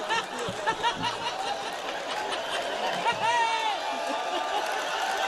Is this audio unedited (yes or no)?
yes